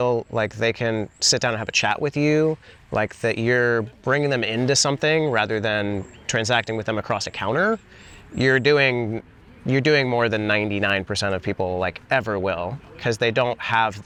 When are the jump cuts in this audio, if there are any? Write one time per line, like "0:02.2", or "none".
none